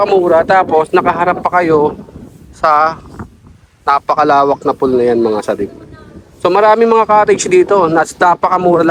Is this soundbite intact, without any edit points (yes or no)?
yes